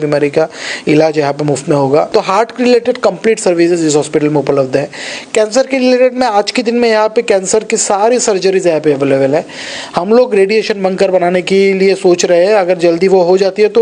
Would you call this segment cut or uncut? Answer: cut